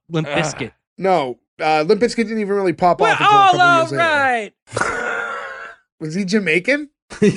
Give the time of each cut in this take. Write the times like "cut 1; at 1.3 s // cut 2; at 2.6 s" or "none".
none